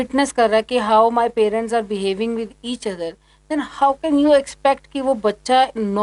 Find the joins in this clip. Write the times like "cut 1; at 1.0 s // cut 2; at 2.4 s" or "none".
none